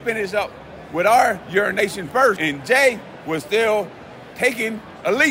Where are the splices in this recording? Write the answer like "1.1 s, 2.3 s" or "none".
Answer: 2.4 s